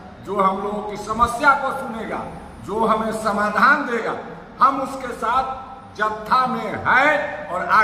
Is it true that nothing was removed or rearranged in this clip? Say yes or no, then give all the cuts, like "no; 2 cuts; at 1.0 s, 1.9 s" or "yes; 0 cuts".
yes; 0 cuts